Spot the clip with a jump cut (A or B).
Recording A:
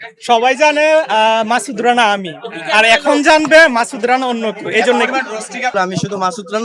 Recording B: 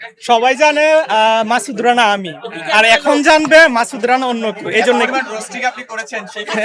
A